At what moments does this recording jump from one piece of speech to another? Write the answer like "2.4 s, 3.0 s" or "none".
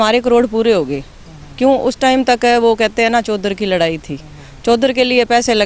none